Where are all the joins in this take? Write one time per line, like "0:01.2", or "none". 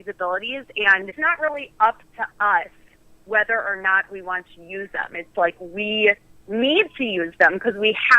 0:01.1